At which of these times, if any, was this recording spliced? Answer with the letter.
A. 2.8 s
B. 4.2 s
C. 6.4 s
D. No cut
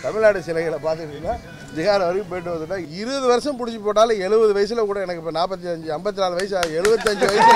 A